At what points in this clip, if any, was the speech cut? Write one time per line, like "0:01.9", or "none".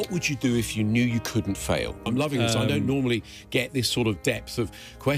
0:02.1